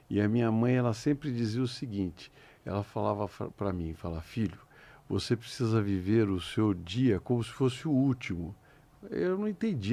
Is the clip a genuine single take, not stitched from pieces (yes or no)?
yes